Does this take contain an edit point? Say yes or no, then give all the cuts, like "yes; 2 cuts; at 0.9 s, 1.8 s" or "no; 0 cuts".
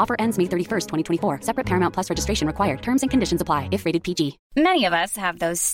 yes; 1 cut; at 4.4 s